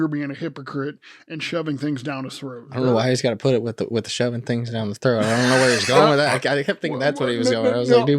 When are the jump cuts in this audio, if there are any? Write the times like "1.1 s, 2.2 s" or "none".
2.7 s